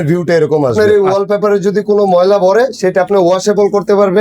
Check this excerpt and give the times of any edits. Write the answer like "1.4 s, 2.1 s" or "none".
0.9 s